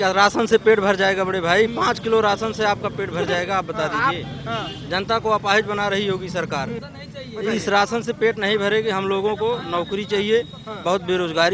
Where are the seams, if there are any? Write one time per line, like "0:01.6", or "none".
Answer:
0:06.9